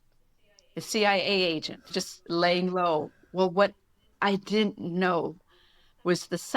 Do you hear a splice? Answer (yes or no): yes